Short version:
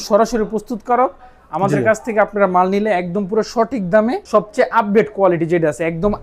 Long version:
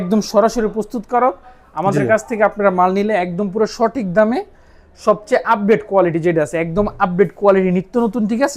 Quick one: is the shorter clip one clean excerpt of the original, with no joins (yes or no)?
no